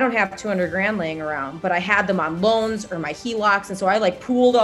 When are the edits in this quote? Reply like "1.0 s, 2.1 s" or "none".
none